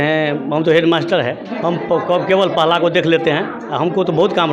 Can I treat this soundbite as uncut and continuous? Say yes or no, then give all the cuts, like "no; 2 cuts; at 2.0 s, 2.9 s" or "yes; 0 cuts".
no; 1 cut; at 1.5 s